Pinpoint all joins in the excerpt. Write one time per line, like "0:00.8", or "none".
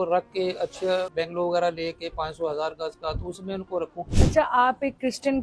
0:01.1
0:04.1